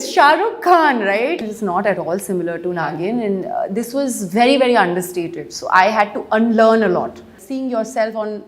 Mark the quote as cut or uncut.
cut